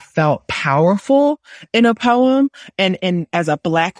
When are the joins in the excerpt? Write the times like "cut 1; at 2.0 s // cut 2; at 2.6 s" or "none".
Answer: none